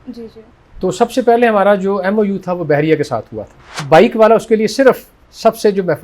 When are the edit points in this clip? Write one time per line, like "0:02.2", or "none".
0:03.8